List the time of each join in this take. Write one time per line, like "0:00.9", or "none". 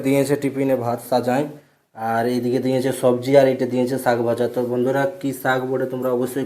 none